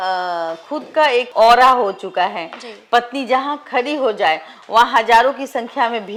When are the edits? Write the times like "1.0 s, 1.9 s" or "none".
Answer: none